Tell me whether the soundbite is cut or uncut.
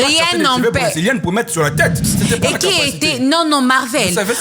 cut